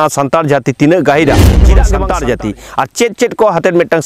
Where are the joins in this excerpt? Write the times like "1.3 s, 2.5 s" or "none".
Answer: 1.7 s